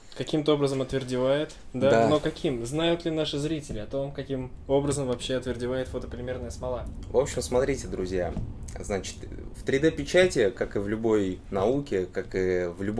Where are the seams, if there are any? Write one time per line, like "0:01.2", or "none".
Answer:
none